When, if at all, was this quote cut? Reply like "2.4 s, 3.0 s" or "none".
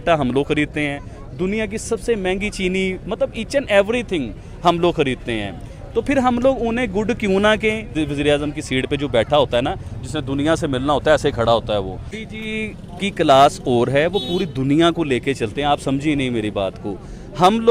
7.9 s, 12.2 s